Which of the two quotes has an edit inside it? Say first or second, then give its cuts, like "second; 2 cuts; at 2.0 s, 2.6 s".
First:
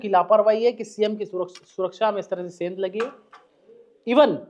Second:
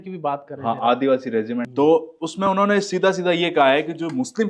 second; 1 cut; at 1.7 s